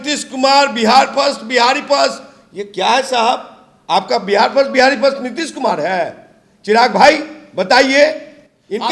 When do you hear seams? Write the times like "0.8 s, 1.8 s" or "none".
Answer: none